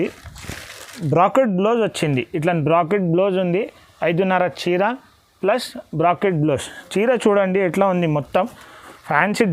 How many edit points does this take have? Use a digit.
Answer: 1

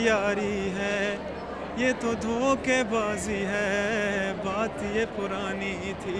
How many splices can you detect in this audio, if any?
0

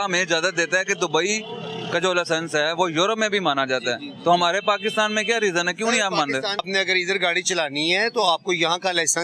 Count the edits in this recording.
1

